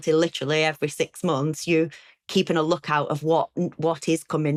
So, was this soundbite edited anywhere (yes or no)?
no